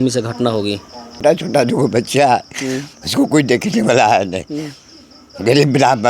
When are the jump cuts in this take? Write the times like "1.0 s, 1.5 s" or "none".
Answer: 1.1 s